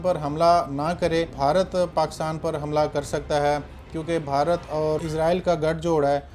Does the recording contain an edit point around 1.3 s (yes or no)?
yes